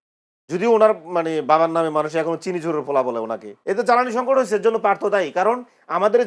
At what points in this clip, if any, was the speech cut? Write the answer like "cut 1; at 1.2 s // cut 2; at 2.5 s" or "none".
cut 1; at 3.5 s